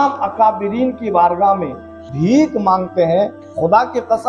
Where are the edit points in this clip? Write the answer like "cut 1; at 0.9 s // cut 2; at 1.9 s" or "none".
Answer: cut 1; at 2.0 s // cut 2; at 3.4 s